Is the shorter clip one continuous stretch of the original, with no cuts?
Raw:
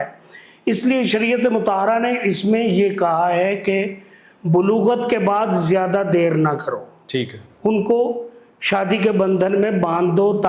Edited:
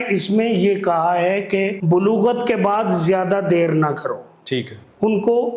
no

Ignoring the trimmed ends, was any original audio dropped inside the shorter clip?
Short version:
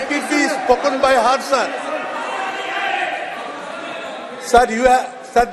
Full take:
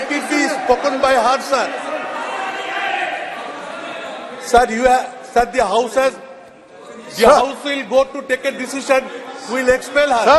no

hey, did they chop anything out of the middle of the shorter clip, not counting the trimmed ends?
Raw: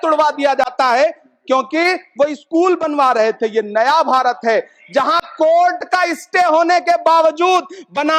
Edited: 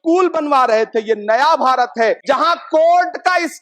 yes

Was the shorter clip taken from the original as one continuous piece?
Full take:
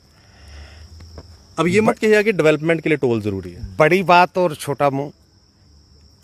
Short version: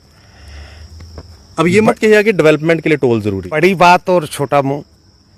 no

